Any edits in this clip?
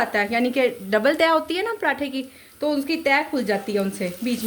no; 0 cuts

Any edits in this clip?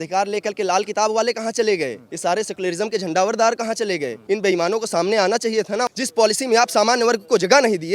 yes; 3 cuts; at 2.0 s, 4.1 s, 5.9 s

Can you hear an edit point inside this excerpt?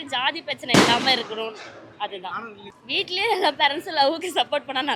no; 0 cuts

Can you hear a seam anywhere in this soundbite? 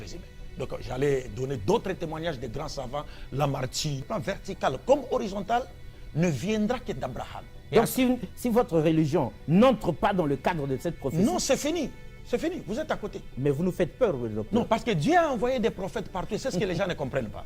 yes; 1 cut; at 4.0 s

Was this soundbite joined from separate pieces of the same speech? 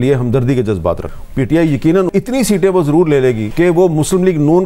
yes; 2 cuts; at 1.1 s, 3.4 s

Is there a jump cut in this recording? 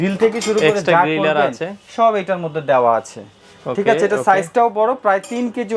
no; 0 cuts

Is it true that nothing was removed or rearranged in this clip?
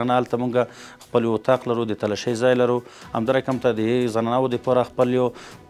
yes; 0 cuts

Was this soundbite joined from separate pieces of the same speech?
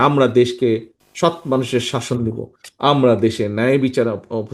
yes; 1 cut; at 1.0 s

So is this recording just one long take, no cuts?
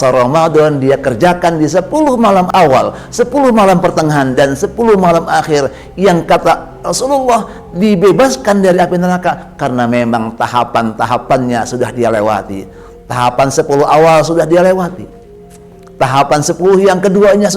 no; 1 cut; at 2.5 s

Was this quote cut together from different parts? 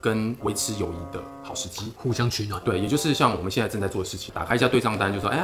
yes; 1 cut; at 4.3 s

